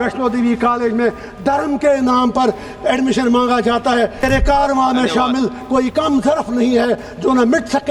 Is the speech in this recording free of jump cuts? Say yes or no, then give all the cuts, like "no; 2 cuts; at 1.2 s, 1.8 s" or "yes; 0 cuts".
no; 1 cut; at 4.2 s